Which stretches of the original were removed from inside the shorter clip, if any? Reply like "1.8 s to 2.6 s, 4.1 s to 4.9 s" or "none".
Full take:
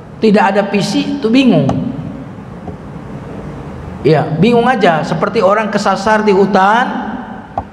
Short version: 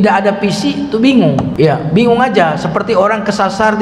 1.8 s to 4.0 s